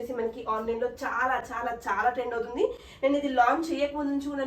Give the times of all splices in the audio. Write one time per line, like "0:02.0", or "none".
none